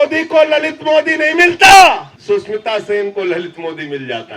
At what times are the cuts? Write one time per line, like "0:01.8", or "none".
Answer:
0:02.1